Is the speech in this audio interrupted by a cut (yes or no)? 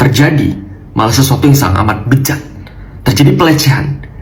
no